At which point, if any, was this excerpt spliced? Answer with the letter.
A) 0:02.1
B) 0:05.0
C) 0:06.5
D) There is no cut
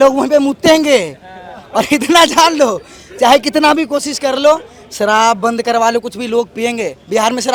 D